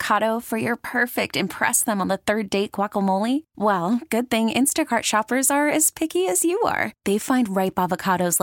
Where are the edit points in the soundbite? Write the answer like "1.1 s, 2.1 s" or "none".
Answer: none